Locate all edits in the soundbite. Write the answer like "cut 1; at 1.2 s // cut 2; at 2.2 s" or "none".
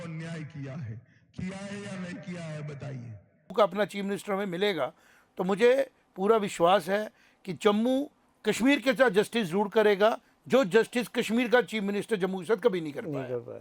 cut 1; at 3.5 s // cut 2; at 8.2 s